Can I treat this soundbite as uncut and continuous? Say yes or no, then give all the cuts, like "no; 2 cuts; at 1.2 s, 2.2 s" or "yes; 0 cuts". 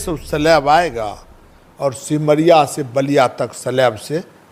yes; 0 cuts